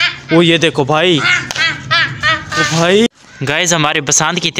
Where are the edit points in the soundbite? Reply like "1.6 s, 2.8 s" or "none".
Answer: 3.1 s